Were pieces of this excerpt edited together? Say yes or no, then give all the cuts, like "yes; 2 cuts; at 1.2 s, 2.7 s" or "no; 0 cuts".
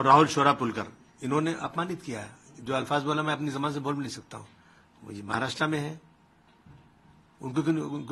no; 0 cuts